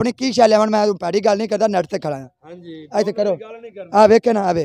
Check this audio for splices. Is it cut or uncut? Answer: uncut